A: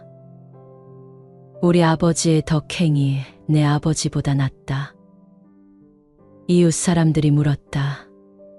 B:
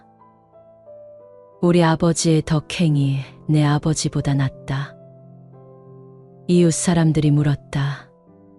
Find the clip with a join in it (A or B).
B